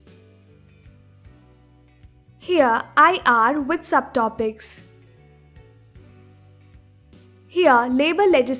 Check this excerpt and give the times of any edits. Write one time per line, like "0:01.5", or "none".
0:02.0
0:04.7
0:07.5